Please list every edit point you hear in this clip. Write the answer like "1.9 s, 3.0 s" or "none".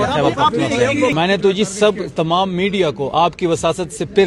1.1 s